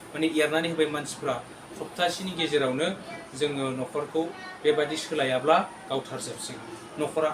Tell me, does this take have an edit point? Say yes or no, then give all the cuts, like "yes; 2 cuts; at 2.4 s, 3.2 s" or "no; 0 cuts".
no; 0 cuts